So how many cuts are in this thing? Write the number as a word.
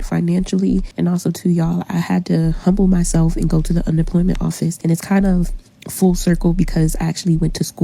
two